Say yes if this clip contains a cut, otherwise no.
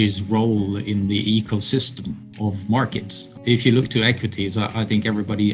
yes